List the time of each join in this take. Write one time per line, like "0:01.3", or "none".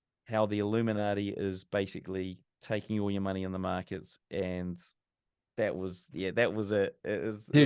none